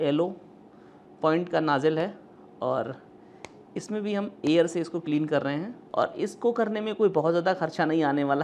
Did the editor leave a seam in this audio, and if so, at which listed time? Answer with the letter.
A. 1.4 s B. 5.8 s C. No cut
B